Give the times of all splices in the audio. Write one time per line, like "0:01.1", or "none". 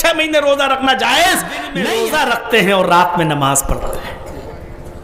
0:01.6